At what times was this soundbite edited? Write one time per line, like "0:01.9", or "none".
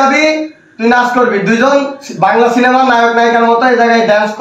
none